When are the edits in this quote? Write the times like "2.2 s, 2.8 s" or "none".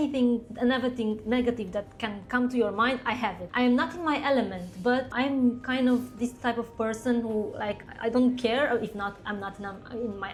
none